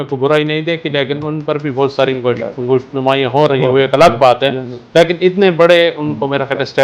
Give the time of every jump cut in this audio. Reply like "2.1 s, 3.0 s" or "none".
none